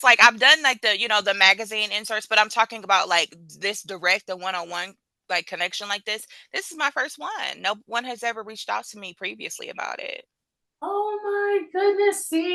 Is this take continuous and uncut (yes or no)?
yes